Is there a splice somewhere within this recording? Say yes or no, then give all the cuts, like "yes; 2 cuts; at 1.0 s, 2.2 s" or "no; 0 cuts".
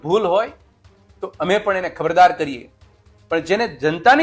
no; 0 cuts